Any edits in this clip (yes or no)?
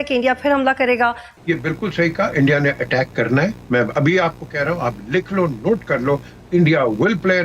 yes